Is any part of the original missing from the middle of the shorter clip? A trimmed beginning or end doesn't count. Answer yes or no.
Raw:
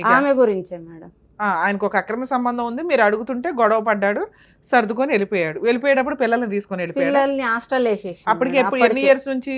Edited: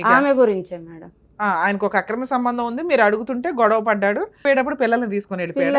yes